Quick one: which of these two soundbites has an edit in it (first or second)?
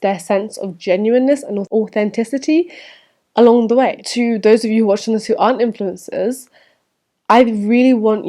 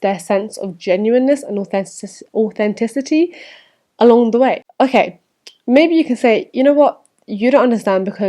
first